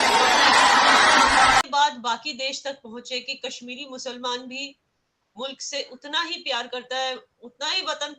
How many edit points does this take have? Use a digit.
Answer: 1